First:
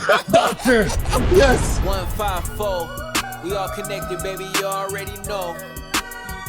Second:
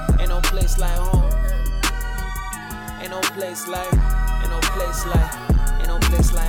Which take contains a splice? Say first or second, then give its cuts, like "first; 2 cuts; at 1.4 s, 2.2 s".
first; 1 cut; at 1.7 s